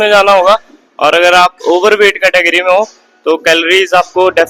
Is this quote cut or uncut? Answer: uncut